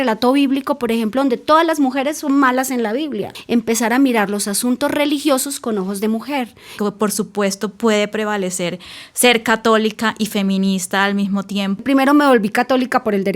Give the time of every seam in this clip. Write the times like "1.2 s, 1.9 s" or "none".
3.3 s, 6.8 s, 11.8 s